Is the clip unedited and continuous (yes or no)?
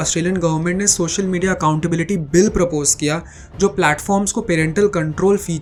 yes